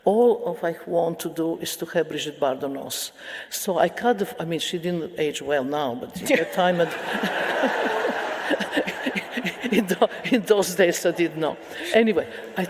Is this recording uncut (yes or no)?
yes